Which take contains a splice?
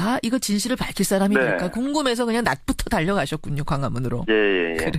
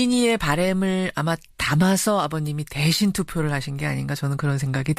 second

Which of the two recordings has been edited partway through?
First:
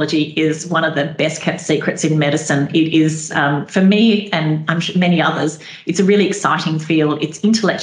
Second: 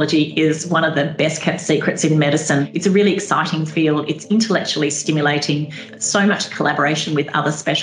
second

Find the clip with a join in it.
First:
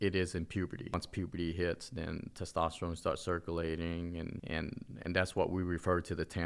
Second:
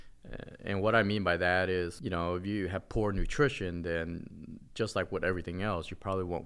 first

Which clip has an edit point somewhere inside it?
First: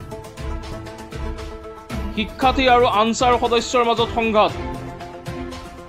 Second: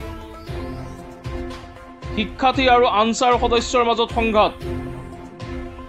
second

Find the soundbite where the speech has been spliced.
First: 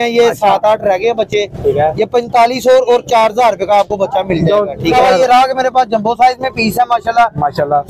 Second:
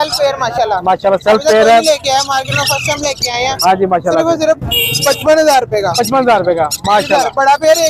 first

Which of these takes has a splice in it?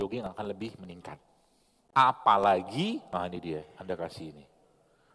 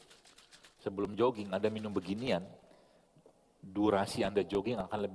first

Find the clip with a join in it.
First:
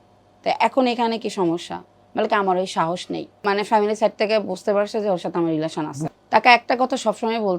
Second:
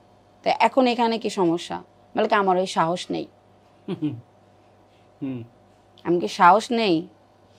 first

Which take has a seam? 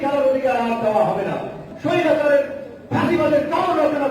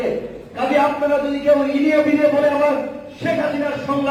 first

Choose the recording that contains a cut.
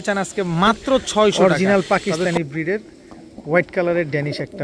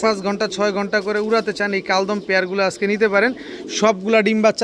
first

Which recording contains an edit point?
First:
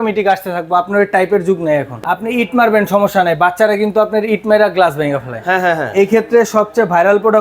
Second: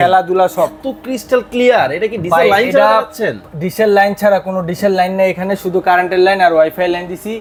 first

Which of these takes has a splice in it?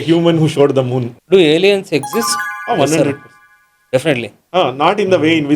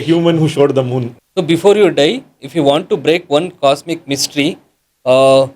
first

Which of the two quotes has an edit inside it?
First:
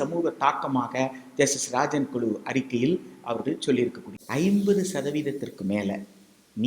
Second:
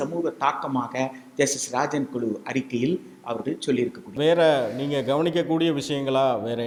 first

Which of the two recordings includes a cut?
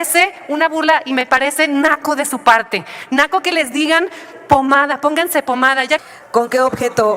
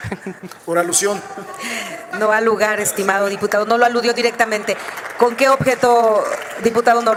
first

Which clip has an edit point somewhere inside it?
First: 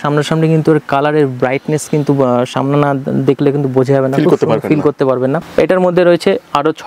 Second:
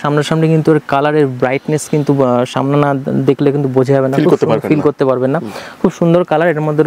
first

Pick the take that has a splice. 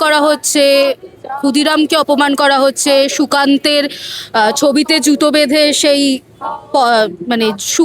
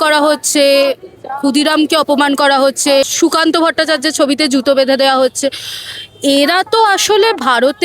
second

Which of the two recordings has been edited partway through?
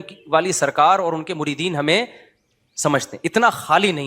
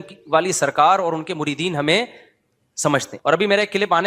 second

